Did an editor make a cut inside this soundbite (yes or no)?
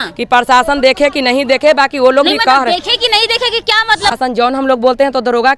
yes